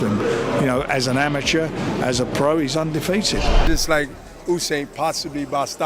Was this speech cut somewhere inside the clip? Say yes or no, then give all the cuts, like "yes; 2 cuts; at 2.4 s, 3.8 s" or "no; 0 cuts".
yes; 1 cut; at 3.7 s